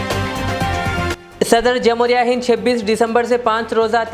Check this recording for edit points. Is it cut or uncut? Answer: cut